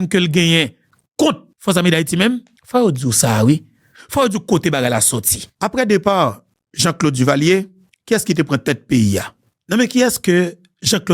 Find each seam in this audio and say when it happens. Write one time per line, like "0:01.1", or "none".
0:05.5